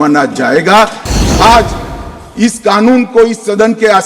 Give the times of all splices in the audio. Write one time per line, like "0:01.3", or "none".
0:01.0